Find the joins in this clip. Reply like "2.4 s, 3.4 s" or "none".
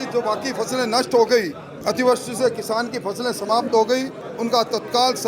1.7 s, 4.2 s